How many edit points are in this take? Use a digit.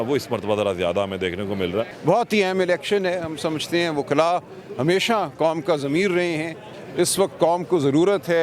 1